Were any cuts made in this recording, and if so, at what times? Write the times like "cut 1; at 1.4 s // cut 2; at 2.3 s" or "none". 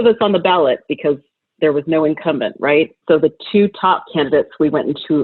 cut 1; at 3.0 s // cut 2; at 4.1 s